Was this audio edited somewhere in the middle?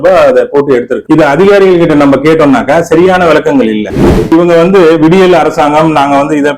yes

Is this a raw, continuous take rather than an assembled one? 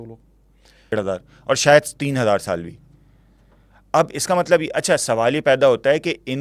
no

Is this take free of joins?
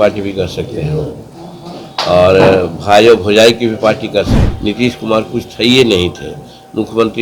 no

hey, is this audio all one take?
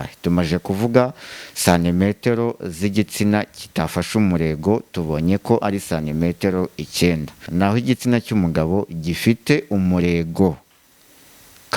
no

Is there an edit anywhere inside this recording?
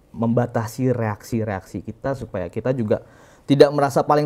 no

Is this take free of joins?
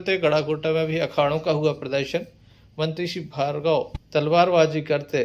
yes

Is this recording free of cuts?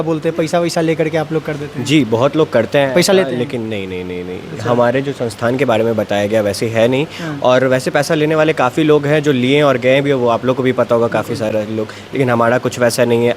yes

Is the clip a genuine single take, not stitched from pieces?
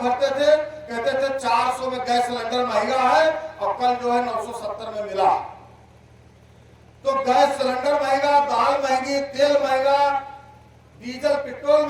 yes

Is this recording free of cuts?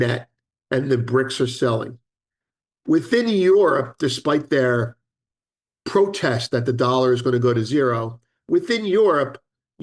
yes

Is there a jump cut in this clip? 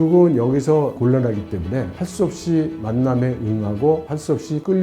yes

